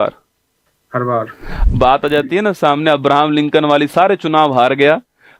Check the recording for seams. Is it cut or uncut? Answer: cut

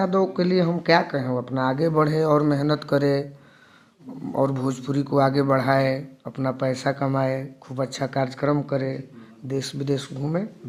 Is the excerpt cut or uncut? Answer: uncut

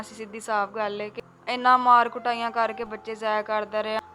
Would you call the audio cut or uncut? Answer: cut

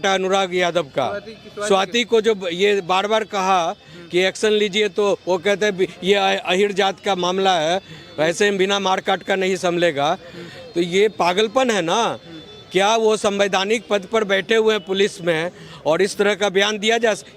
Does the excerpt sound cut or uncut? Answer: uncut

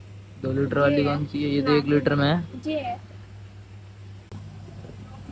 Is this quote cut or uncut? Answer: cut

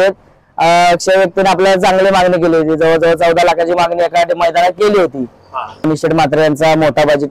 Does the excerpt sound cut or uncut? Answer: cut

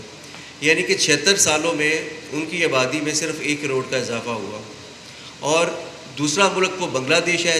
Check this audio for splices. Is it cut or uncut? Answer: uncut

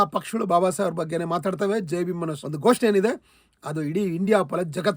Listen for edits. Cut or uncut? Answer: cut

